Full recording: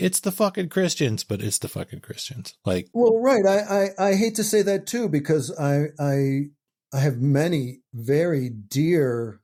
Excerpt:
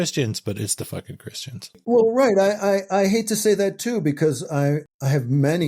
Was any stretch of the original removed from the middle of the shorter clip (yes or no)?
yes